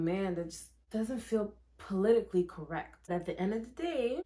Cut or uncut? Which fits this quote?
cut